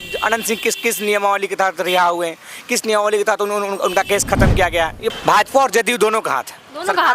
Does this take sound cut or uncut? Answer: cut